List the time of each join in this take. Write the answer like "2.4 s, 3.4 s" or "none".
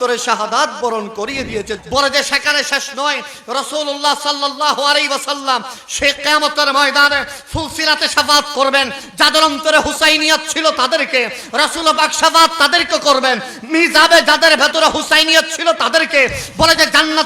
1.8 s